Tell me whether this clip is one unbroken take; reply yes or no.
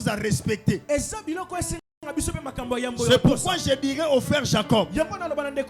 yes